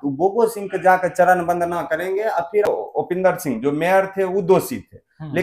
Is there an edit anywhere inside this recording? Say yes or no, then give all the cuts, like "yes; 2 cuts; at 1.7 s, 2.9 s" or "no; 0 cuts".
yes; 1 cut; at 2.7 s